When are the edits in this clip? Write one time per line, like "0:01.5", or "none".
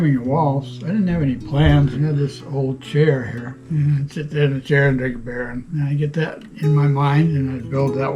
0:01.9
0:03.6
0:05.6